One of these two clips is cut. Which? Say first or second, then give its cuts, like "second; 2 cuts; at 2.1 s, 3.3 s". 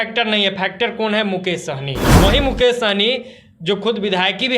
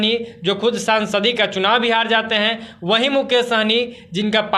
first; 1 cut; at 2.0 s